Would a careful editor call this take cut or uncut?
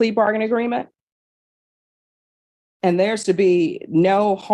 uncut